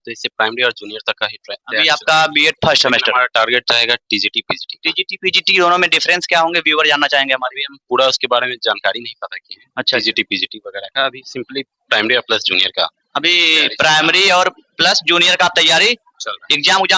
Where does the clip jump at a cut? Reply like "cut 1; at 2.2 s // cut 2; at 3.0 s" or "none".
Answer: none

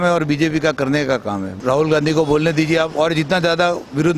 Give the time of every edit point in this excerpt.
cut 1; at 1.6 s

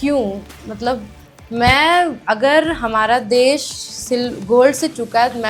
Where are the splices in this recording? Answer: none

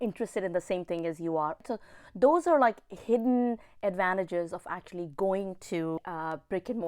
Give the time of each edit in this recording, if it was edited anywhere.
cut 1; at 1.6 s // cut 2; at 6.0 s

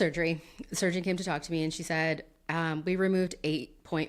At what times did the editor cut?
none

